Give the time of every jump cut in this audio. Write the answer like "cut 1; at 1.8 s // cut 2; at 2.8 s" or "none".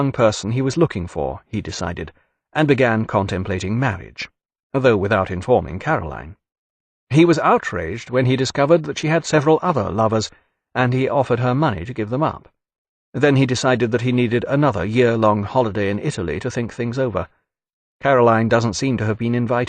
cut 1; at 16.6 s